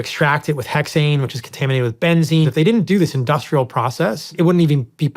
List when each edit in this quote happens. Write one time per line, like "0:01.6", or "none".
0:02.5
0:04.3